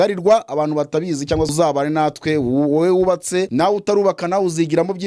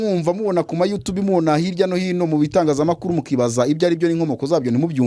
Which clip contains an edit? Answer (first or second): first